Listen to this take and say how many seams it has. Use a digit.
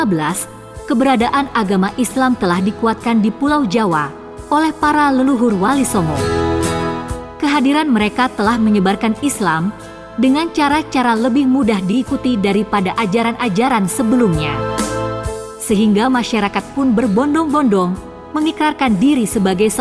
0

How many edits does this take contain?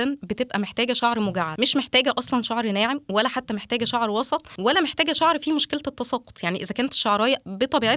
2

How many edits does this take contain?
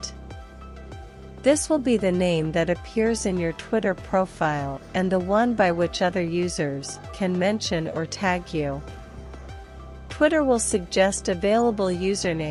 0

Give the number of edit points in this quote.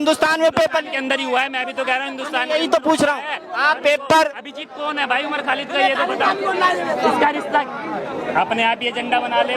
0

